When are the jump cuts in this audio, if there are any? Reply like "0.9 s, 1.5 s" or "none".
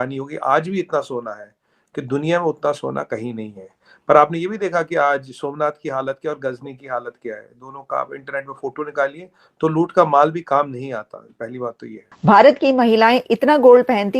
12.1 s